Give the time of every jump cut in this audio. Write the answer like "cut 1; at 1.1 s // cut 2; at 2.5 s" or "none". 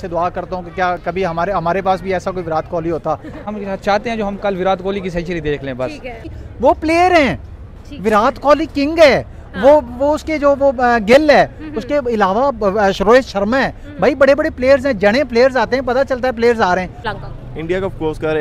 cut 1; at 3.4 s // cut 2; at 6.4 s // cut 3; at 17.1 s